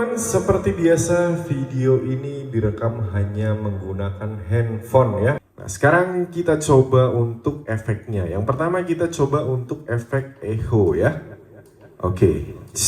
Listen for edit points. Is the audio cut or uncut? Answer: cut